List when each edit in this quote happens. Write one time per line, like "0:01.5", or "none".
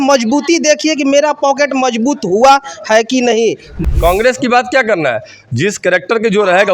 0:03.7